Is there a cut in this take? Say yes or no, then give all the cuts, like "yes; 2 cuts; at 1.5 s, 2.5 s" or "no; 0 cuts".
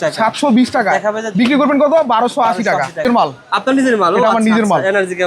yes; 1 cut; at 3.0 s